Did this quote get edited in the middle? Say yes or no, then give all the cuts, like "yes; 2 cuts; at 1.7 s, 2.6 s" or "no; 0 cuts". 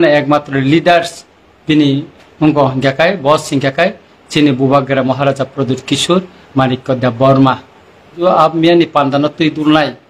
yes; 1 cut; at 8.2 s